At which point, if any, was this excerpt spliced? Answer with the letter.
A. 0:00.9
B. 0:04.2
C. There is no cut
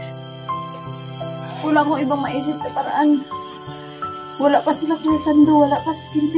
A